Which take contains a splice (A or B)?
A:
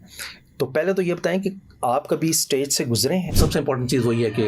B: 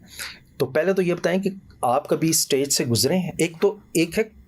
A